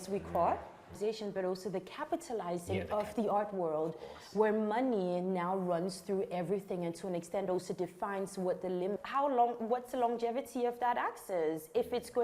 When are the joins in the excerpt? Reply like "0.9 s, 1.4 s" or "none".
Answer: 0.9 s, 9.0 s